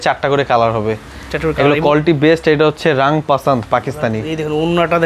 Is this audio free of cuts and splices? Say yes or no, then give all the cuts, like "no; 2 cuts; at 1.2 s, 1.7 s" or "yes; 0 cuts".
yes; 0 cuts